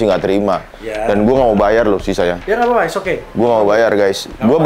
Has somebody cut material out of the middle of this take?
no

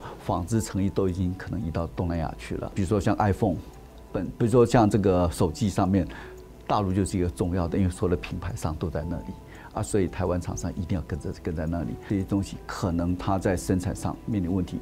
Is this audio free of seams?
no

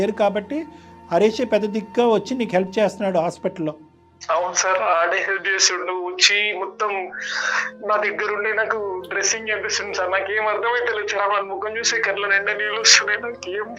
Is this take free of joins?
yes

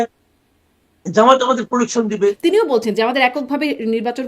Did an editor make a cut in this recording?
yes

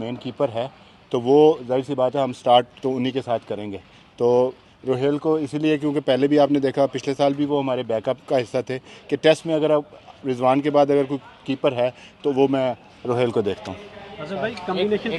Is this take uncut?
yes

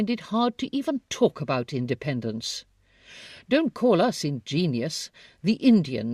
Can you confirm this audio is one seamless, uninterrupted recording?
yes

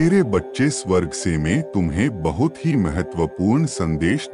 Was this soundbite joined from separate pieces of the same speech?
no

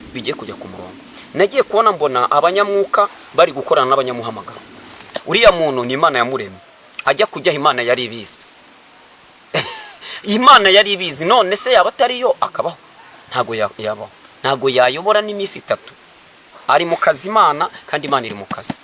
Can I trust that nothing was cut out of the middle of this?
no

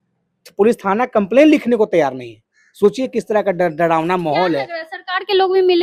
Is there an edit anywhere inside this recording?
no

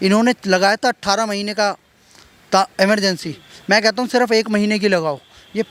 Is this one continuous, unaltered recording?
yes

